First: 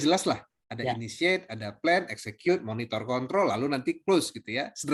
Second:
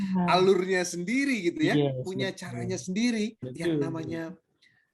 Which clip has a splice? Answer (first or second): second